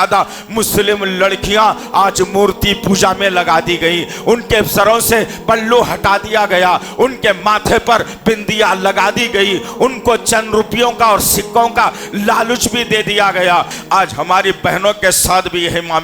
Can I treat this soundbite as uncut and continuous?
no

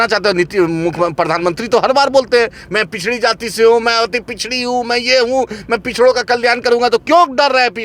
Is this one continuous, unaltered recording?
yes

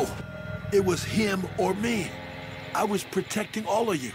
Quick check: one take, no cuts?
yes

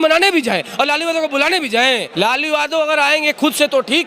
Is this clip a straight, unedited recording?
no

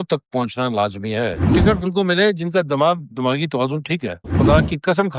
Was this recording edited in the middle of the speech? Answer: yes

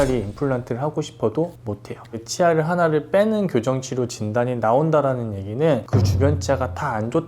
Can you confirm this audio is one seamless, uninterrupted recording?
no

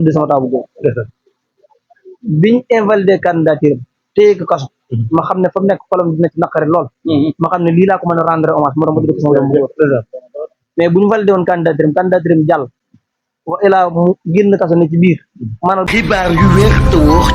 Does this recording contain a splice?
yes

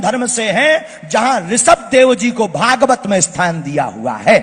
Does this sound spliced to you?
no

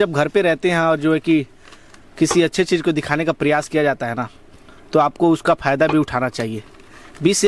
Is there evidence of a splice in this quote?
no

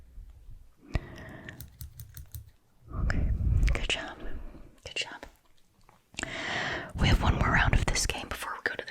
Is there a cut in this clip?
no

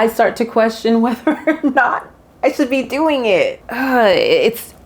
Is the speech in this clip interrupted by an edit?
yes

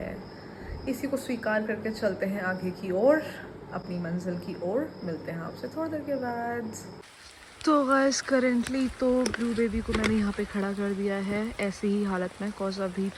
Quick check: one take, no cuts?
yes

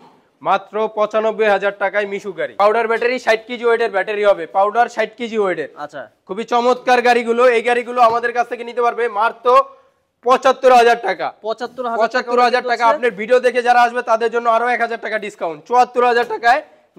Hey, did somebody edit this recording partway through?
yes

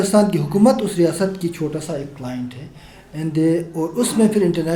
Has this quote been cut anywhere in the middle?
no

